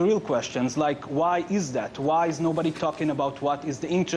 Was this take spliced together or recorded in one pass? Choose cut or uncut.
cut